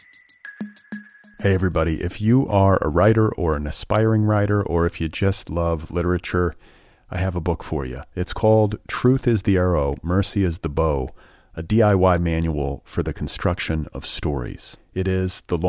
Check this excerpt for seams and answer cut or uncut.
cut